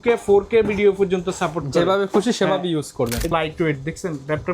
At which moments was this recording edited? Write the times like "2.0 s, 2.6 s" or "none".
3.3 s

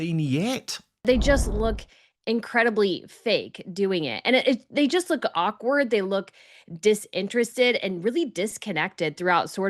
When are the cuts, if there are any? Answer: 1.0 s

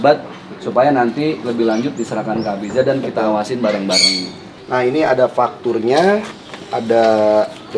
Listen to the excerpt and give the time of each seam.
4.6 s

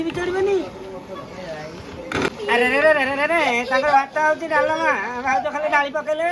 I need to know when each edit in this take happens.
2.3 s

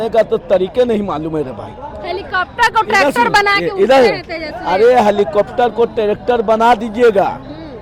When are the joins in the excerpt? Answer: none

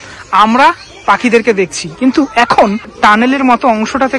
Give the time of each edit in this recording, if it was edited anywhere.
2.9 s

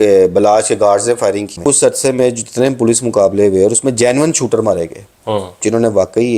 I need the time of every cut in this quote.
1.5 s

